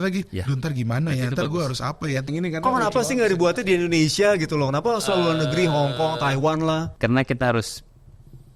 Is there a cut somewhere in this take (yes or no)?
yes